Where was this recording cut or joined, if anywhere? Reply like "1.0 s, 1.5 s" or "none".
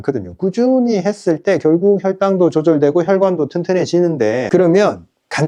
4.4 s

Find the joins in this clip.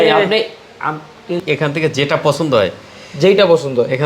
1.4 s

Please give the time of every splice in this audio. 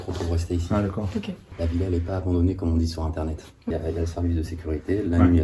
1.5 s, 3.7 s

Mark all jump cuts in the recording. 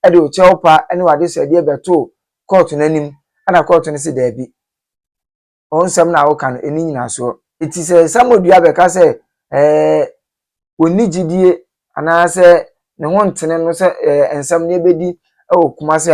7.7 s

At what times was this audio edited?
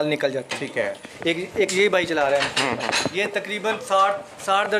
1.1 s, 3.1 s

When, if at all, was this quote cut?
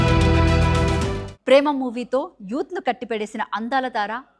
none

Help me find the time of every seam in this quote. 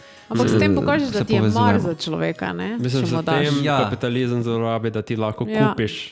none

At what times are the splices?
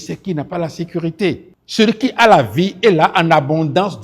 1.6 s

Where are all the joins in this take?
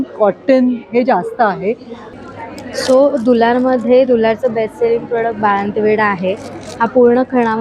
2.1 s

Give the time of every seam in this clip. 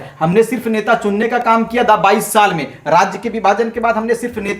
none

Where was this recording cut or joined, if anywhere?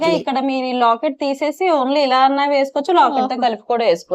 none

